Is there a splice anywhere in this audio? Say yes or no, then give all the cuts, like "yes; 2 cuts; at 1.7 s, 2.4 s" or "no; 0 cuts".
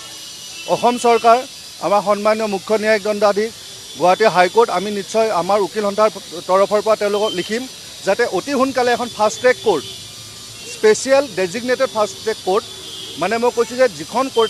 no; 0 cuts